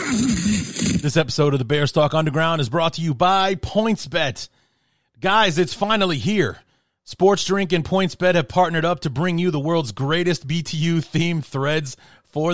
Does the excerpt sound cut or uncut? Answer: cut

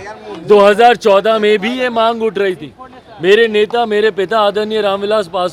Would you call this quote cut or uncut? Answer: uncut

